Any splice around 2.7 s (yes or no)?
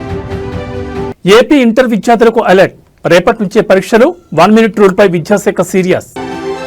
no